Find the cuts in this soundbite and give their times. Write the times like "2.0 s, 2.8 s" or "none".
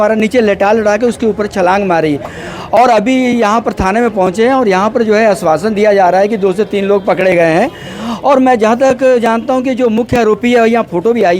none